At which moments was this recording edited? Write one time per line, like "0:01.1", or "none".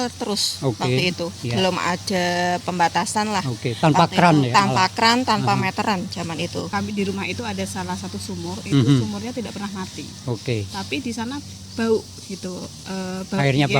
0:06.6